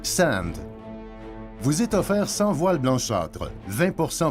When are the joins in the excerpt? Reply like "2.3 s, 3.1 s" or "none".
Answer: 1.1 s